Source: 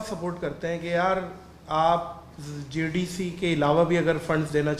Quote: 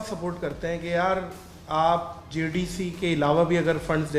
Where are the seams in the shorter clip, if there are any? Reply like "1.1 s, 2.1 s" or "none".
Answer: 2.2 s